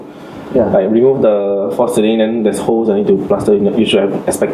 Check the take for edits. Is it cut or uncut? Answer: uncut